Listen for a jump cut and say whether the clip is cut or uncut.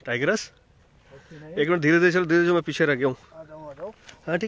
uncut